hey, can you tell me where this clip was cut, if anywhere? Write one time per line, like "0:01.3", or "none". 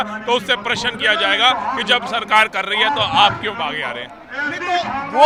none